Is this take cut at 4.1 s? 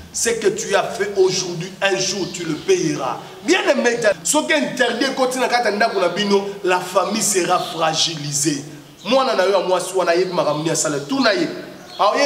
yes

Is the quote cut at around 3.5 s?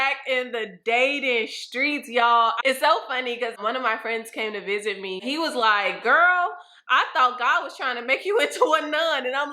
yes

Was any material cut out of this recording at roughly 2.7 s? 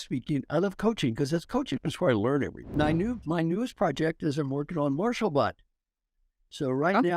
yes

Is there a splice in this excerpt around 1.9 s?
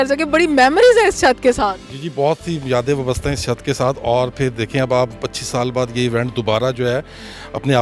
no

